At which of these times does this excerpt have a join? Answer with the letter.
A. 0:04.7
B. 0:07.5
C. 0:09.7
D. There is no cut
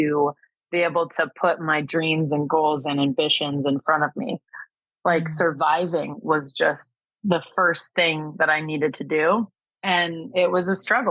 C